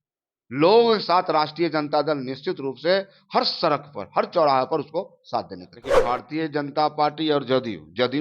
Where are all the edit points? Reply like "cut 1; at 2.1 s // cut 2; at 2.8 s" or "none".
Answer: cut 1; at 6.0 s